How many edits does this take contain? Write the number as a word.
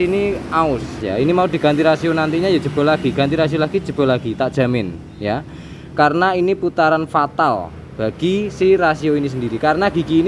one